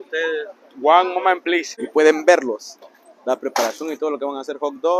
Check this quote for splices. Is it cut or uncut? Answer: cut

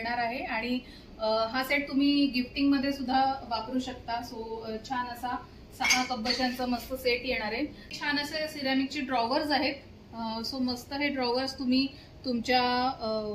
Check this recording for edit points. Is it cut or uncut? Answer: cut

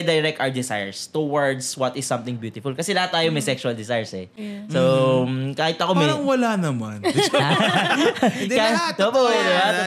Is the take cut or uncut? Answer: uncut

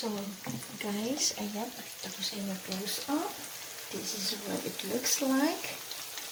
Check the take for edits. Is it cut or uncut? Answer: uncut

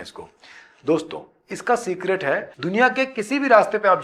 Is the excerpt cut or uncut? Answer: cut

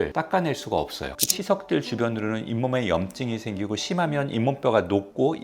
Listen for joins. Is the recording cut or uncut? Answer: cut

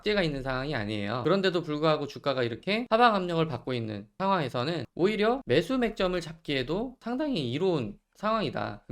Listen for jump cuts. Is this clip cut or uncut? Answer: cut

